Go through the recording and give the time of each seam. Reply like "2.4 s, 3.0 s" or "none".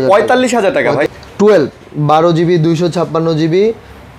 1.1 s